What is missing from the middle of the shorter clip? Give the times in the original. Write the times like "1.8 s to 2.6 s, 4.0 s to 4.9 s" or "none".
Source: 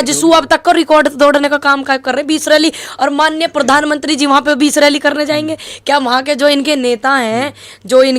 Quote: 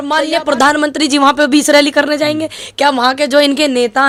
none